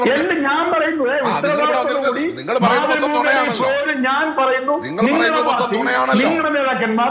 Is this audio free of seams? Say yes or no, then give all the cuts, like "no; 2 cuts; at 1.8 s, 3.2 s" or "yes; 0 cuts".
yes; 0 cuts